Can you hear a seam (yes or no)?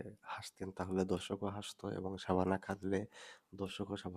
no